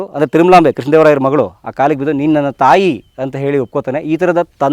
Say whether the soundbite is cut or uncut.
uncut